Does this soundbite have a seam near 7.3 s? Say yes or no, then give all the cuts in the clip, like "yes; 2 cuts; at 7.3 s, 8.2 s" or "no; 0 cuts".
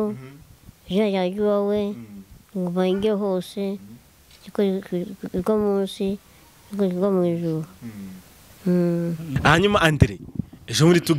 no; 1 cut; at 9.3 s